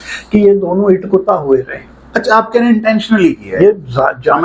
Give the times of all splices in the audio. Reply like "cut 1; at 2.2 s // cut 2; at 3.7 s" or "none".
none